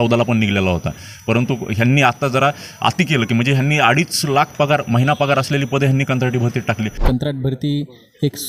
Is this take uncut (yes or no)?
no